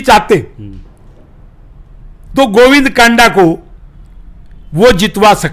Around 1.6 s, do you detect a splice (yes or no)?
no